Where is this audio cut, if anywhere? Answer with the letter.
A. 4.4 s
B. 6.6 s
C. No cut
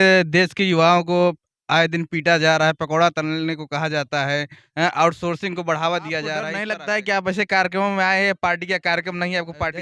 B